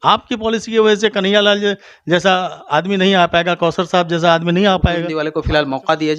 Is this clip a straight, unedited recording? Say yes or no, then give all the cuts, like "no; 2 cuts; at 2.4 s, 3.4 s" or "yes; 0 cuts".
no; 1 cut; at 5.1 s